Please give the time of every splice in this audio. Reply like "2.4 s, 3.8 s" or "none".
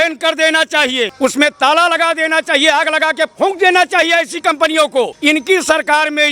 1.1 s, 5.1 s